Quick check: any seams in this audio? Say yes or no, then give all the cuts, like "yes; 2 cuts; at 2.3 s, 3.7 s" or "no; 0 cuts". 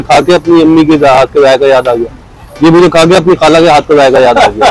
no; 0 cuts